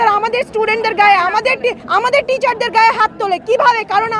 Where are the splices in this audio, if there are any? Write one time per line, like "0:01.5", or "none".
0:01.8